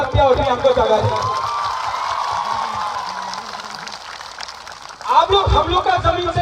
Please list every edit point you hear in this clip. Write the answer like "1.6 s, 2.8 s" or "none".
3.2 s

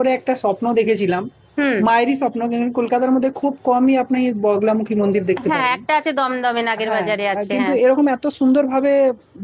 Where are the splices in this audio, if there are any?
none

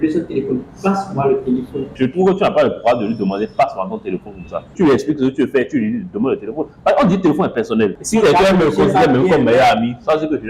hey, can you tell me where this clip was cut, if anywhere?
1.9 s, 4.7 s, 8.0 s

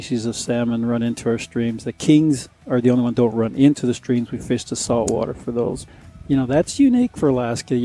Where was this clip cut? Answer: 5.9 s

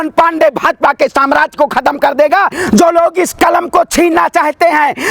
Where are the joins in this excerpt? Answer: 2.6 s

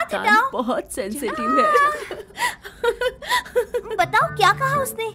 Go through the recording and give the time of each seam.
3.9 s

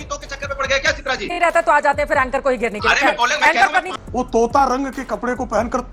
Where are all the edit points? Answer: 1.3 s, 3.9 s

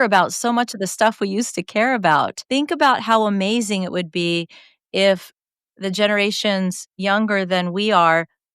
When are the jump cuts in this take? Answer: 2.4 s

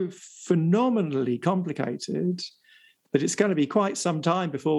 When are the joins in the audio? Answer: none

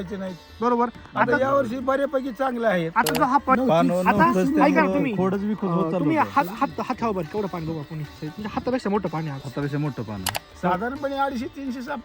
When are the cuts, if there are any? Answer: 3.6 s, 10.4 s

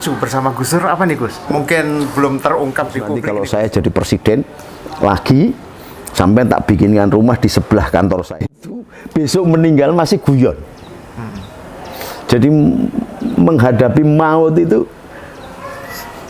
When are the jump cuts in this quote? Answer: 1.5 s, 3.2 s, 8.5 s

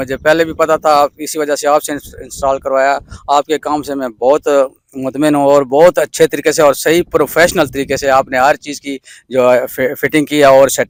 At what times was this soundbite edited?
none

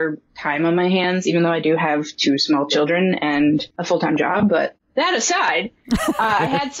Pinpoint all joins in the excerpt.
3.7 s

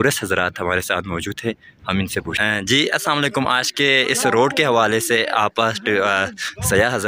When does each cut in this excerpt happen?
none

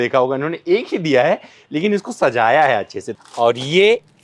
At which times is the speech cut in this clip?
3.1 s

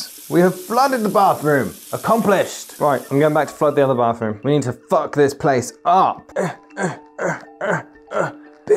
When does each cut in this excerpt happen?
none

